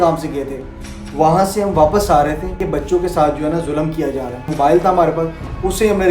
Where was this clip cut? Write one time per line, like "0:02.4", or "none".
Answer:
0:02.6
0:04.4